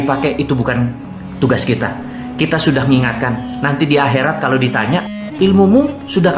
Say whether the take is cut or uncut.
cut